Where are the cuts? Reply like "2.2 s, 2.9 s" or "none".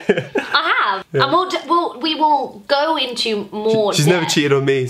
1.0 s